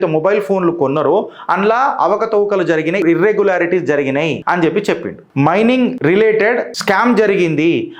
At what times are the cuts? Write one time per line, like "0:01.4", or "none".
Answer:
0:03.0
0:04.4
0:05.2
0:06.0
0:06.7

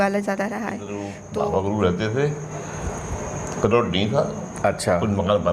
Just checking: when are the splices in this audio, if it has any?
0:01.2

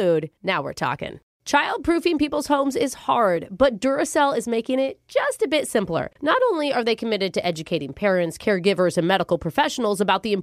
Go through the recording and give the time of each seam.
0:01.3

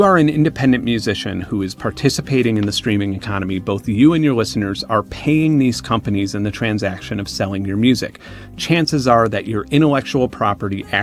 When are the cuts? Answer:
none

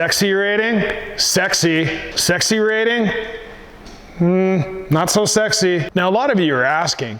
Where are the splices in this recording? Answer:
0:05.9

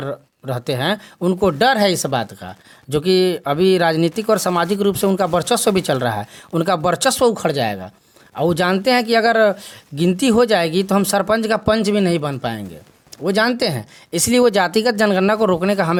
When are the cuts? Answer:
none

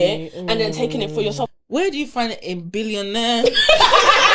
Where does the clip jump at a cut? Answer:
0:01.5

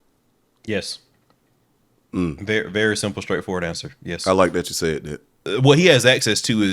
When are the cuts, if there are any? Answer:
0:05.4

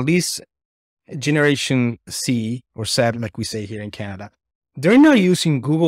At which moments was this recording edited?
0:02.1

